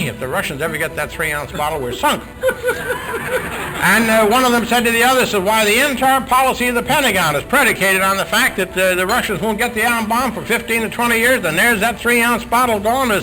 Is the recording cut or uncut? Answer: uncut